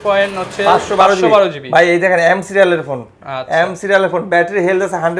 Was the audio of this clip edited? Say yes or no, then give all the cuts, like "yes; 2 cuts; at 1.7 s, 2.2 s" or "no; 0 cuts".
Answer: no; 0 cuts